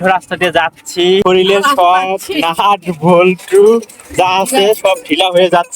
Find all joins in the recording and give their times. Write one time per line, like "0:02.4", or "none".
0:01.2